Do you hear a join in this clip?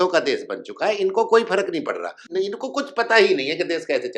yes; 1 cut; at 2.3 s

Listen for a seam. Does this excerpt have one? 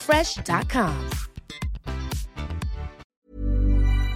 yes; 1 cut; at 3.0 s

